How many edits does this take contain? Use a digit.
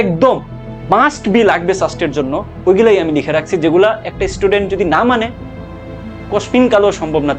0